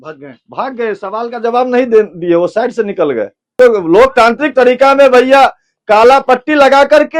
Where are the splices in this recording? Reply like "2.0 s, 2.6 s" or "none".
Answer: 3.5 s